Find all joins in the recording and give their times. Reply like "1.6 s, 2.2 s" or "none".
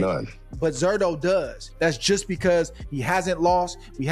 1.7 s